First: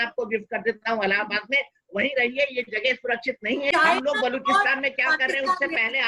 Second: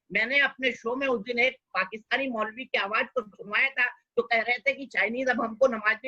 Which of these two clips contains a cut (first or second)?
first